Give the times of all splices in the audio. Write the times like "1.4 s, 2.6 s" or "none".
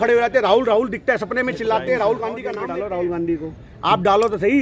2.5 s